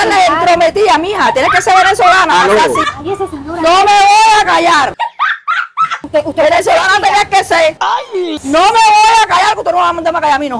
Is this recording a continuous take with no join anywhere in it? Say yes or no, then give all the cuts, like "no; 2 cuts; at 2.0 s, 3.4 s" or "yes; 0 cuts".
yes; 0 cuts